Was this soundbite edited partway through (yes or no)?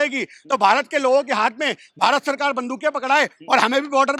no